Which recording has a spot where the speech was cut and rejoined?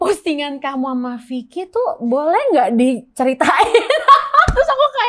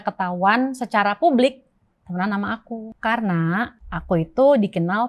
second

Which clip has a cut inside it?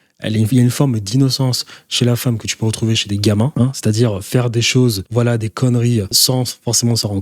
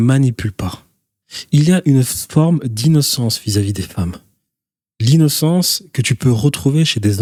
first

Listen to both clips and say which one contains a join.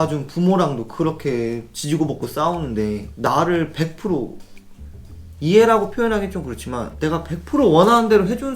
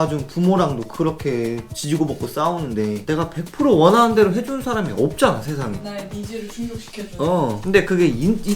second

